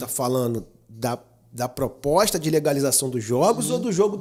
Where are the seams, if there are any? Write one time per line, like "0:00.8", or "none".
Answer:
none